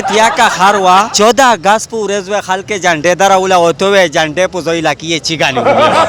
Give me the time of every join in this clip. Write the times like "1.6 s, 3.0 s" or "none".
1.1 s